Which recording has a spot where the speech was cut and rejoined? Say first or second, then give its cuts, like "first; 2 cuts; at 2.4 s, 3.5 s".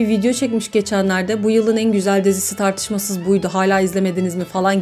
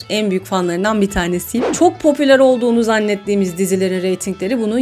second; 1 cut; at 1.7 s